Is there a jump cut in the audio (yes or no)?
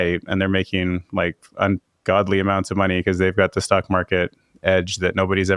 no